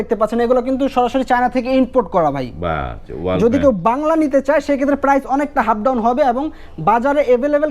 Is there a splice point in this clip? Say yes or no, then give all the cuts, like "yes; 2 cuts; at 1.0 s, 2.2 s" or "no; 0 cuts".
no; 0 cuts